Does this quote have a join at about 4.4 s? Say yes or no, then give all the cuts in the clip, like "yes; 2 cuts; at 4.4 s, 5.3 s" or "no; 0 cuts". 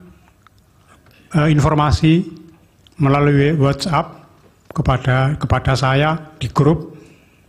yes; 1 cut; at 4.4 s